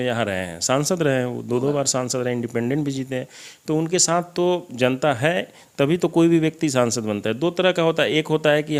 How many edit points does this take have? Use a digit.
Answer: 0